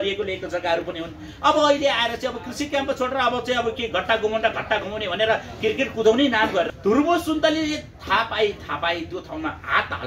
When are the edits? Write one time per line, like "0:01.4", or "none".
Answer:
0:06.7